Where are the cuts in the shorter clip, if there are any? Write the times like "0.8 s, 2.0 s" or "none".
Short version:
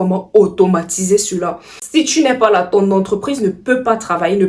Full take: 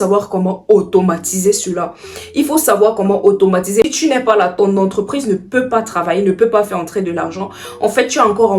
2.0 s